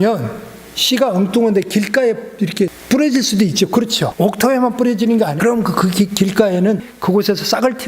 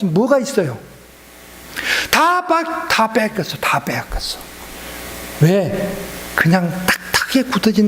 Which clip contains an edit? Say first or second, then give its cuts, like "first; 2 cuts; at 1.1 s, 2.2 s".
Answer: first; 4 cuts; at 2.8 s, 4.0 s, 5.4 s, 6.9 s